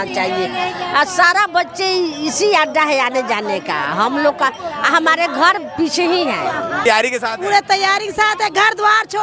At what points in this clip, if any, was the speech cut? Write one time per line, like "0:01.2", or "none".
0:06.9